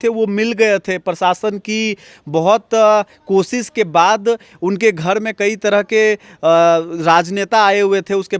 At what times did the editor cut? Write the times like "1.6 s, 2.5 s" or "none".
none